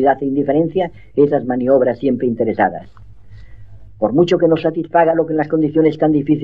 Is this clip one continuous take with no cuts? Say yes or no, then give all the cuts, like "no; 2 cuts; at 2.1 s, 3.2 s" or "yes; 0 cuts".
yes; 0 cuts